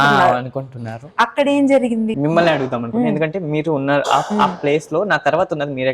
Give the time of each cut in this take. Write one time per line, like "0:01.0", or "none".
0:02.1